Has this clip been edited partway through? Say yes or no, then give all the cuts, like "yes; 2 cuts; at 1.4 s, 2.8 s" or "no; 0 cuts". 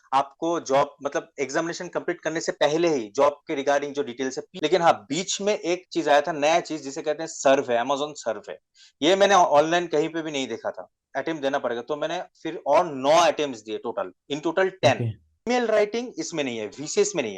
yes; 3 cuts; at 4.5 s, 11.0 s, 15.5 s